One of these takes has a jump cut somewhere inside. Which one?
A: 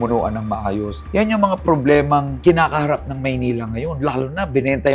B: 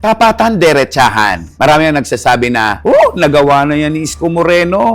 A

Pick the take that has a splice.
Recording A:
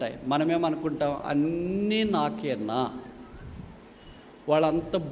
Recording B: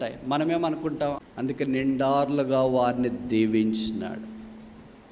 B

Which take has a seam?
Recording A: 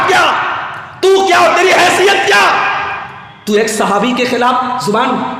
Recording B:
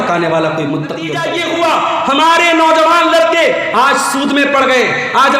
B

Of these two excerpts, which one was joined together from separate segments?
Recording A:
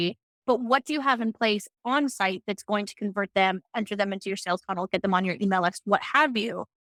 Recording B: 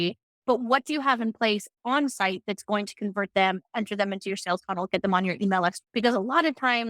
B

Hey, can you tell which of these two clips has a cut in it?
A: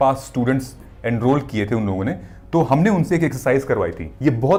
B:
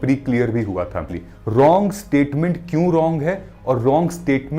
B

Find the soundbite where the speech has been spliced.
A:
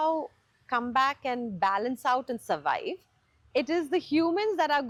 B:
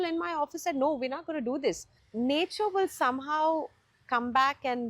B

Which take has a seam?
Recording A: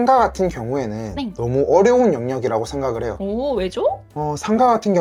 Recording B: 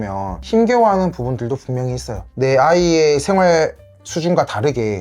B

